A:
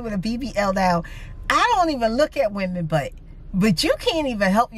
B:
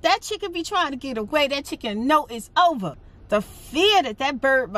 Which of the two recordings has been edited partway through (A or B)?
B